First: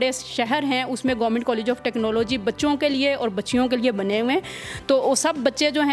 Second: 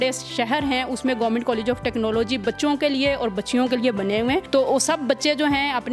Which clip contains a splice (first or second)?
second